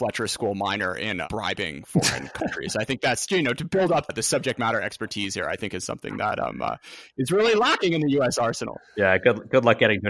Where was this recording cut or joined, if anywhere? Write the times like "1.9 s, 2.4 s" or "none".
1.2 s, 4.1 s